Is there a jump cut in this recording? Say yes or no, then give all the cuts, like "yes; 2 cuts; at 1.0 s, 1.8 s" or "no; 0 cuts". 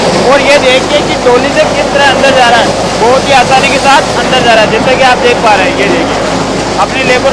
no; 0 cuts